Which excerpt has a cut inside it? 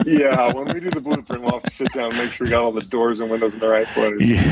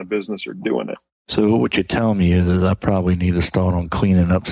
second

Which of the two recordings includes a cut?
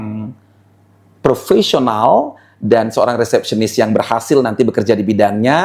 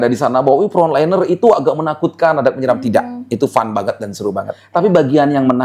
second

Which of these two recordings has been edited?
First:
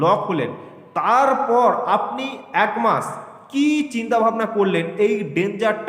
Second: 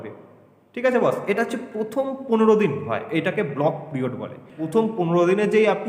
second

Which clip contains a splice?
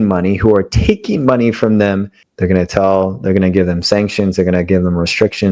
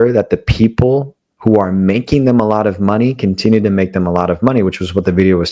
first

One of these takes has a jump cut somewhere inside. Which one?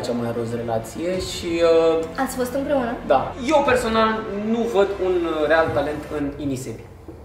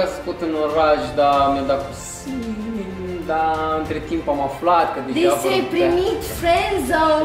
first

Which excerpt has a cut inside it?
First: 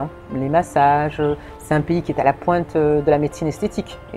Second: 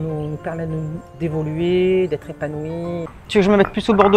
second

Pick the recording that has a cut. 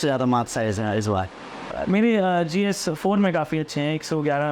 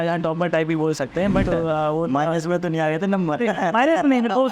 second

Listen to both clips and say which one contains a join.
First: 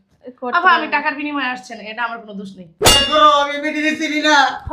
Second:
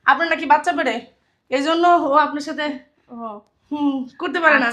first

